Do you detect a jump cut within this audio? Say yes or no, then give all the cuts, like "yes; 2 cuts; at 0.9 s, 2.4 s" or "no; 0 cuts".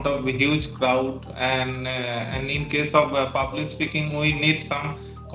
no; 0 cuts